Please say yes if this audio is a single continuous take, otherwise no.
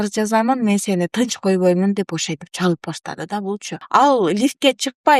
no